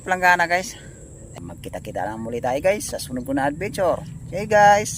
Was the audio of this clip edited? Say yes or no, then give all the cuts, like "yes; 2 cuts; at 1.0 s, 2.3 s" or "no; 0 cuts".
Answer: yes; 1 cut; at 1.2 s